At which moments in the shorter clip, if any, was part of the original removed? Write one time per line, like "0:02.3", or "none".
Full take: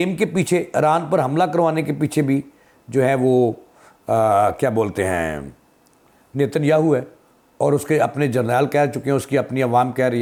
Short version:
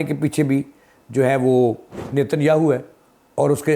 0:01.9